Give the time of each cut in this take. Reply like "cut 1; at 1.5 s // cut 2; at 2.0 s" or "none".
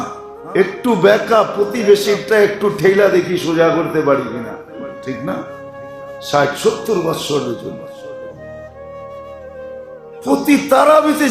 none